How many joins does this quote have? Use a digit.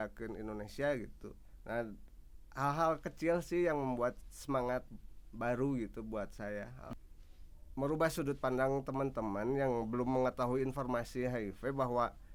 1